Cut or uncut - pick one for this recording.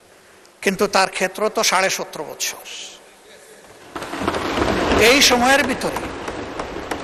uncut